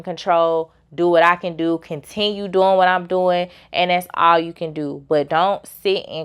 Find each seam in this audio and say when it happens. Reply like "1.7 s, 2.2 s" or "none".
none

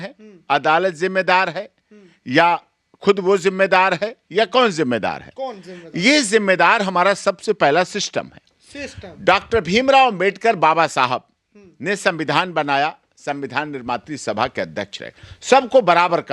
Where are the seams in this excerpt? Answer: none

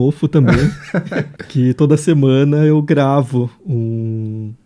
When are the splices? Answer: 1.4 s

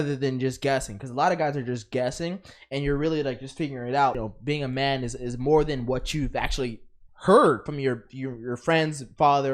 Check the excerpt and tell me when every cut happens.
4.2 s

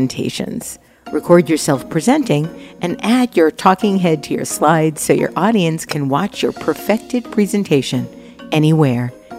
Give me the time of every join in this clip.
none

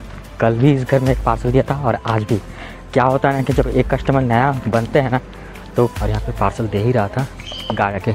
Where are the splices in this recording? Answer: 5.9 s

